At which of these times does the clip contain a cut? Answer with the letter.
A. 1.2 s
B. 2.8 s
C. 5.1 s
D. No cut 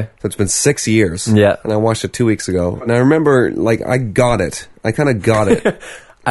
B